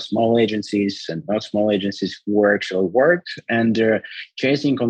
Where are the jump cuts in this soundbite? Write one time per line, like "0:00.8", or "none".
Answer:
0:03.3